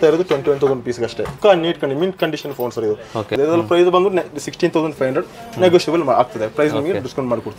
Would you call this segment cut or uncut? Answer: cut